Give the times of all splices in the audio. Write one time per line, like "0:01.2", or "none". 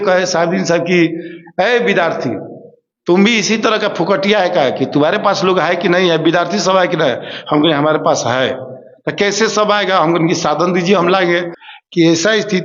0:11.6